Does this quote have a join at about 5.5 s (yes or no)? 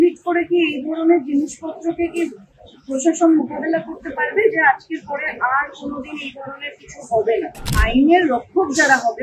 no